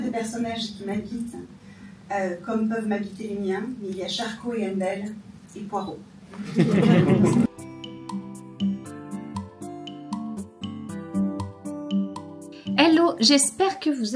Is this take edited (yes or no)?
no